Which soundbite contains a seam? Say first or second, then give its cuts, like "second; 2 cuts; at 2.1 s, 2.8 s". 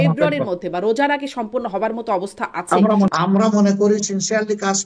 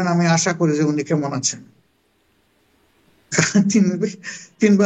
first; 1 cut; at 3.1 s